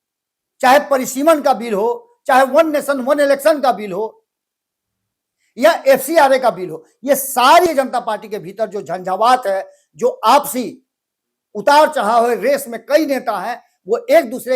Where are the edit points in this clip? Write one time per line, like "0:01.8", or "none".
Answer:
0:07.7